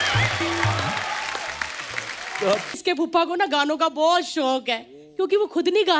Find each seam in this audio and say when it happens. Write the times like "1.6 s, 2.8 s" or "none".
2.8 s